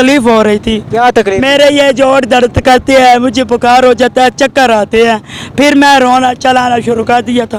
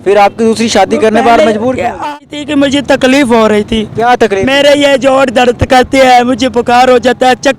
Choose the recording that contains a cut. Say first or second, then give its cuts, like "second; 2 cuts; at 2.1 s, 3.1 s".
second; 1 cut; at 2.1 s